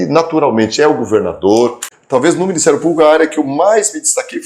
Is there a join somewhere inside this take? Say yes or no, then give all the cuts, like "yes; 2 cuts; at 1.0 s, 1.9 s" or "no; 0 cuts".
yes; 1 cut; at 1.9 s